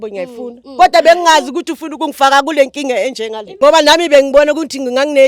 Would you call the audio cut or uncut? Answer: cut